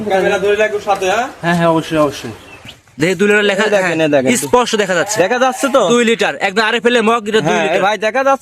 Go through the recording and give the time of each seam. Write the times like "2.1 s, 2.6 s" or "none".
2.7 s